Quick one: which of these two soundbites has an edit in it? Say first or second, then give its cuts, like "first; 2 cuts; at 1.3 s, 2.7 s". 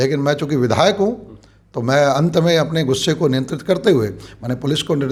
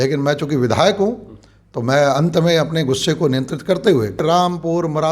second; 1 cut; at 4.2 s